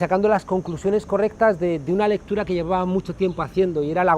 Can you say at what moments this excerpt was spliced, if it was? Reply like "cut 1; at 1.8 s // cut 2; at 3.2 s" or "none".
cut 1; at 2.6 s